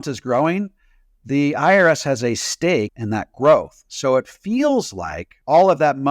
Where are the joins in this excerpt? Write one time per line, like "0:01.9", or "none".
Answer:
0:03.0